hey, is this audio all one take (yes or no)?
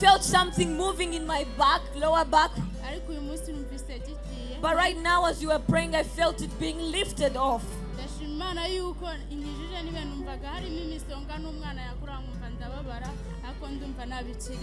yes